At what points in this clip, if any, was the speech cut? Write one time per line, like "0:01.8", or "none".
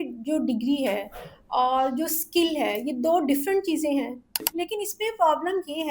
0:04.5